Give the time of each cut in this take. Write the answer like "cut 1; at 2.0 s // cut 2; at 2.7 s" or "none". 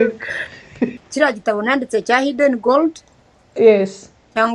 cut 1; at 0.9 s